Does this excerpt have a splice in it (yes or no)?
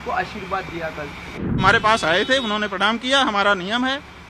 yes